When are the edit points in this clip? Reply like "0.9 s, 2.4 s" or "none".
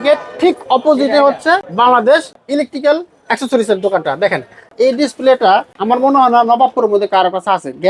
1.7 s, 2.3 s, 4.7 s, 5.7 s

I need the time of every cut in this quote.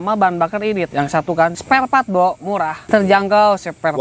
0.9 s, 1.6 s, 2.8 s

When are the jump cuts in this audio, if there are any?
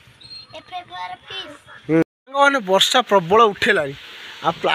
2.0 s

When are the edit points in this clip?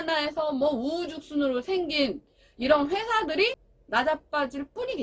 3.7 s

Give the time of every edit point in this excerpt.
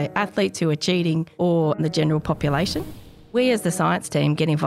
1.8 s, 3.3 s

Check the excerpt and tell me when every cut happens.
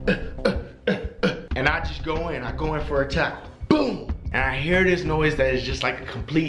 1.4 s, 4.2 s

